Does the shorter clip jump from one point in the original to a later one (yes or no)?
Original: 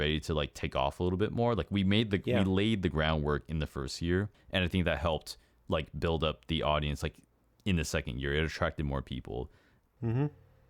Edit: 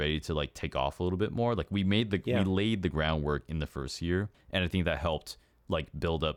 no